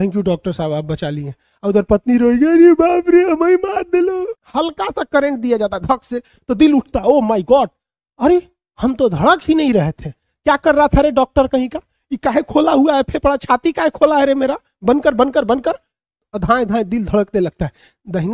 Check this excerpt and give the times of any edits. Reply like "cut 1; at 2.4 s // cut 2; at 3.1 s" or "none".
cut 1; at 4.4 s